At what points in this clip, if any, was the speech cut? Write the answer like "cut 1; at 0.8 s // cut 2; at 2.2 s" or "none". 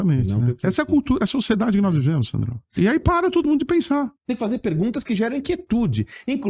cut 1; at 2.6 s // cut 2; at 4.2 s